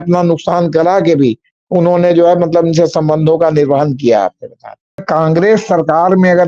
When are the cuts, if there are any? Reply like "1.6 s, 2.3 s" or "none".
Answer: 5.0 s